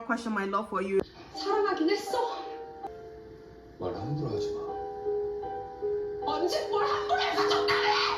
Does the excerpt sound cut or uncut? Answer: cut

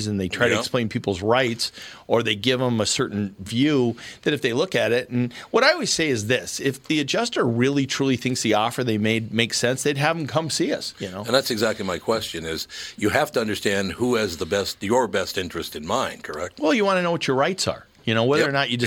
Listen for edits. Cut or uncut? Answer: uncut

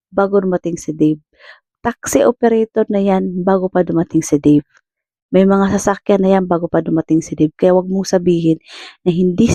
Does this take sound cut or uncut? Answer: uncut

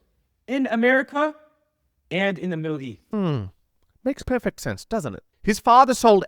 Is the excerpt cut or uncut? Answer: cut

